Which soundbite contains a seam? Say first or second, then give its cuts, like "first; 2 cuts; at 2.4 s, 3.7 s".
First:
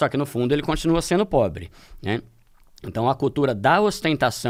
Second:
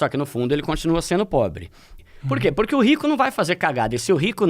second; 1 cut; at 1.9 s